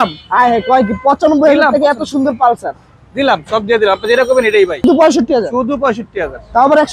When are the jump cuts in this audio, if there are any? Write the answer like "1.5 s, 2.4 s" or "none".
4.8 s